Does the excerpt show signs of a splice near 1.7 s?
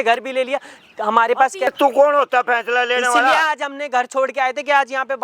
yes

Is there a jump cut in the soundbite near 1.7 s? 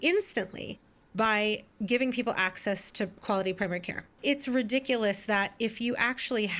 no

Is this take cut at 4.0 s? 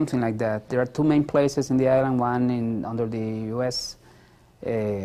yes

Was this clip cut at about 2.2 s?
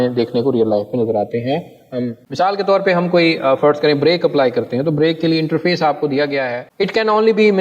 yes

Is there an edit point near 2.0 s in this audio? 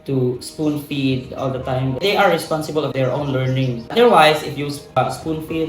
yes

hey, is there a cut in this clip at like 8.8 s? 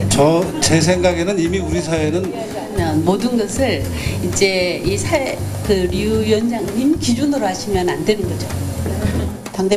no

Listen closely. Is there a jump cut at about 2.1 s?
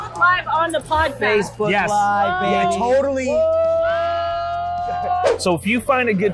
no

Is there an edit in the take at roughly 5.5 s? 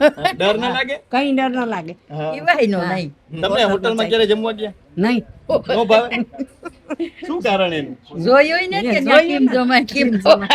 no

